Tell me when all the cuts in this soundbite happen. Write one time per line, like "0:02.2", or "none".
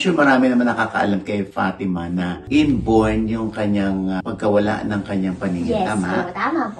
none